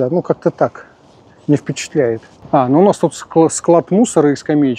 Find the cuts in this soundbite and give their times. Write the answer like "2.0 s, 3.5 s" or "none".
2.3 s